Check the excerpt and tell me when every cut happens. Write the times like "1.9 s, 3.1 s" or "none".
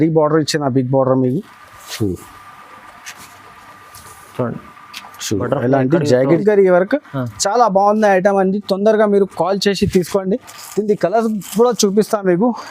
6.4 s